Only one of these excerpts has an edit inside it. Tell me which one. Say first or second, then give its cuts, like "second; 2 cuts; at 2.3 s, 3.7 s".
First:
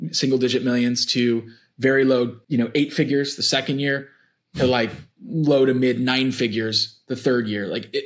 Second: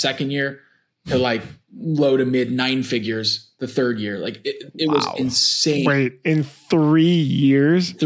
first; 1 cut; at 2.4 s